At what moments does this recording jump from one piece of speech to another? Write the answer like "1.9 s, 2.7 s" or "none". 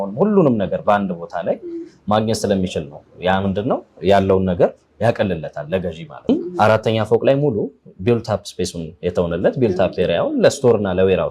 6.3 s